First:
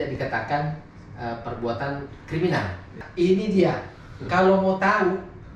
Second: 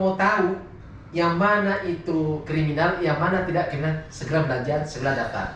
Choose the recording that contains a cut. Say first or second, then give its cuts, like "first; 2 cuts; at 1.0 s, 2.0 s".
first; 1 cut; at 3.0 s